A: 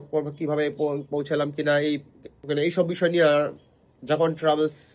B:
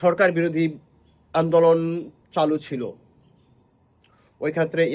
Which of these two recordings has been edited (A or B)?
A